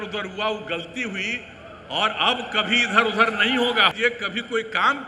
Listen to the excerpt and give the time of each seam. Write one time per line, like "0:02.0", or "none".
0:03.9